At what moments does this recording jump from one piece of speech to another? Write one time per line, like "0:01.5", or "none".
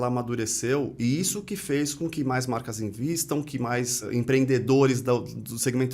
0:04.0